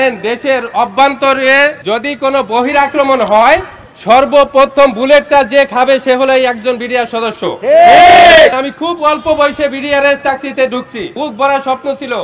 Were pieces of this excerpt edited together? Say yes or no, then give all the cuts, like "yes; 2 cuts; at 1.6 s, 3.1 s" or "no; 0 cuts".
yes; 3 cuts; at 1.8 s, 8.6 s, 11.1 s